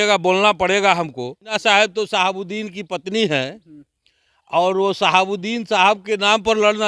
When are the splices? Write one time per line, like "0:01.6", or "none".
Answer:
0:01.6